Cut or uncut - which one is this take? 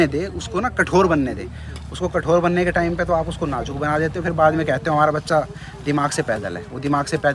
uncut